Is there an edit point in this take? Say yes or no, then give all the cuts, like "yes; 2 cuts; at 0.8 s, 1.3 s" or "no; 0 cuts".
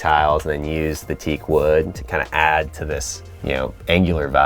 no; 0 cuts